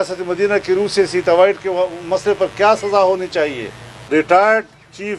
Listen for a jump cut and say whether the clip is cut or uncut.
cut